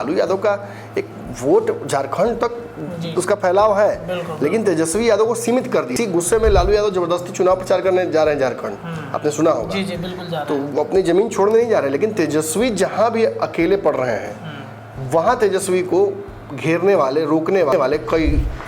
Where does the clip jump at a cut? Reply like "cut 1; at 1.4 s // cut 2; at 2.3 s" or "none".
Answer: cut 1; at 5.9 s // cut 2; at 17.7 s

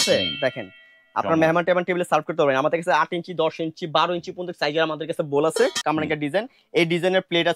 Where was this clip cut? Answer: cut 1; at 5.8 s

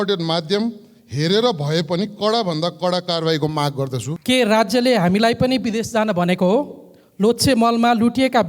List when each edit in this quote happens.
cut 1; at 4.1 s

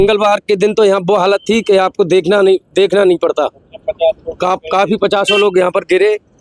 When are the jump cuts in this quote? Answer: none

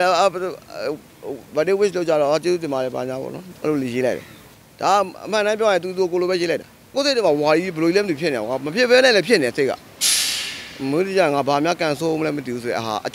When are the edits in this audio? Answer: cut 1; at 6.9 s

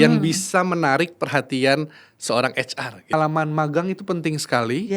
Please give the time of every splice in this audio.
cut 1; at 3.1 s

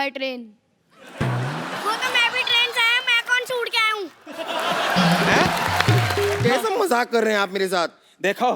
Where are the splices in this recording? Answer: cut 1; at 6.4 s

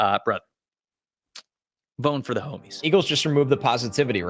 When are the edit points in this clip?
cut 1; at 2.8 s

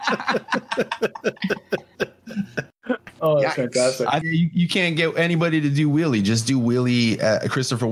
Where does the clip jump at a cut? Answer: cut 1; at 2.7 s // cut 2; at 4.2 s

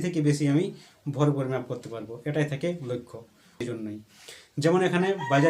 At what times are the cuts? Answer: cut 1; at 3.6 s

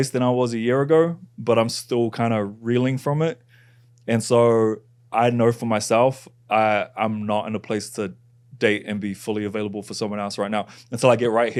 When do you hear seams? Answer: none

